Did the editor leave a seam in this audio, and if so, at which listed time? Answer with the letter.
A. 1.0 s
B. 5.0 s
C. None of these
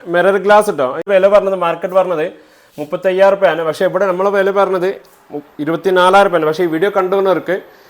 A